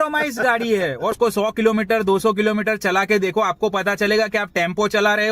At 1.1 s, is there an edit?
yes; 1 cut; at 1.1 s

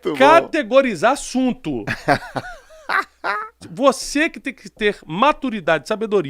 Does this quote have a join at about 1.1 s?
no; 1 cut; at 3.6 s

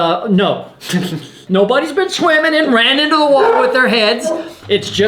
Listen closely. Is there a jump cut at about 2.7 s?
no; 1 cut; at 1.4 s

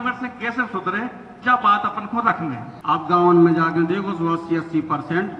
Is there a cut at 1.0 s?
no; 1 cut; at 2.7 s

